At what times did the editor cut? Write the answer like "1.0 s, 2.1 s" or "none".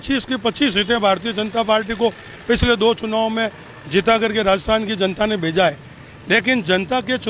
none

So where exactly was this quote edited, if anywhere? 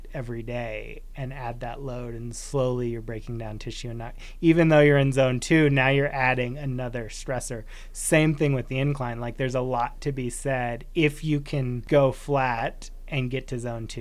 11.8 s

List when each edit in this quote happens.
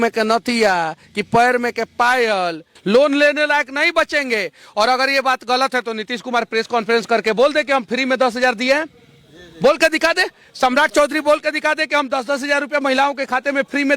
2.7 s

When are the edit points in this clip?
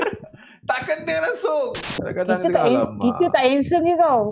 1.9 s

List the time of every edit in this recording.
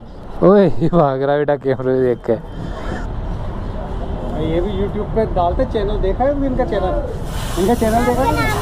2.8 s

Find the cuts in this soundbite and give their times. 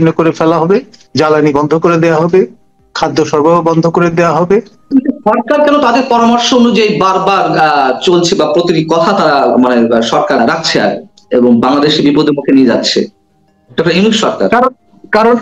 1.0 s, 4.9 s, 10.4 s

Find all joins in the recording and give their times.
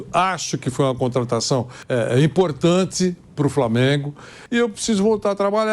1.8 s, 4.3 s

